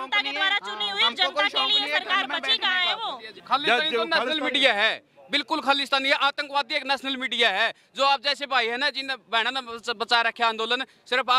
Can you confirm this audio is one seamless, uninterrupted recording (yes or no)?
no